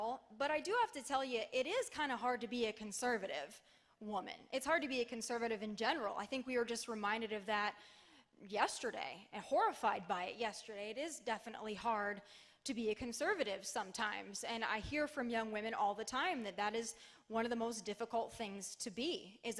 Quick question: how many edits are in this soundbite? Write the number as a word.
one